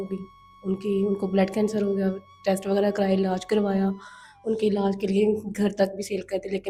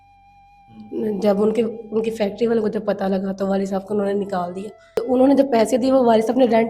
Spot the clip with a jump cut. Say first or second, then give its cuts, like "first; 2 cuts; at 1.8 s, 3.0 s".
second; 1 cut; at 5.0 s